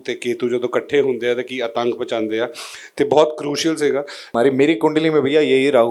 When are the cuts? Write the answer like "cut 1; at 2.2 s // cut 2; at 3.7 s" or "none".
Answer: cut 1; at 4.2 s

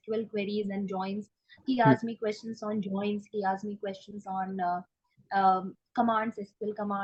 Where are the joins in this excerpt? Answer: none

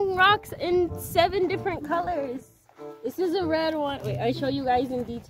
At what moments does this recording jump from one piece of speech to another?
none

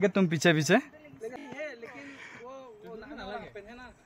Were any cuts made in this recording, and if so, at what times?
cut 1; at 1.4 s

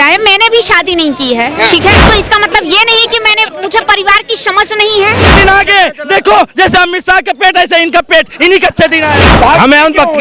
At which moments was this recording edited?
cut 1; at 2.0 s // cut 2; at 5.2 s // cut 3; at 9.3 s

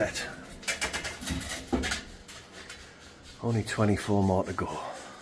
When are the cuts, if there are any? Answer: none

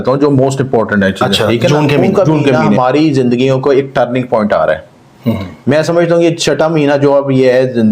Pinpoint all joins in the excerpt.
cut 1; at 2.8 s

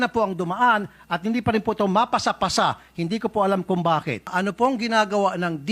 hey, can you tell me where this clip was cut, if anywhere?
cut 1; at 4.3 s

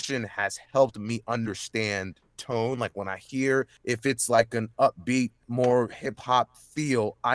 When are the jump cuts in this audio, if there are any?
cut 1; at 3.8 s // cut 2; at 5.4 s

